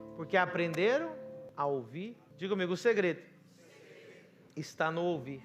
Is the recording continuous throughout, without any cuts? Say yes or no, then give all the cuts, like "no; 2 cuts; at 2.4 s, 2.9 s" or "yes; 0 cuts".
no; 2 cuts; at 1.5 s, 2.2 s